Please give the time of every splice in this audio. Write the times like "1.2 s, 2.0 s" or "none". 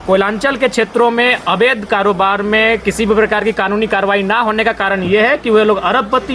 none